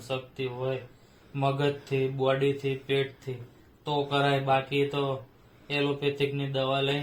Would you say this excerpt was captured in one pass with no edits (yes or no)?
yes